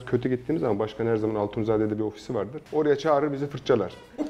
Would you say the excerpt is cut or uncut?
cut